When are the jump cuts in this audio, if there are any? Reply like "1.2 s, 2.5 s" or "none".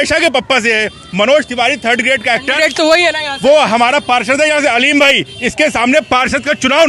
none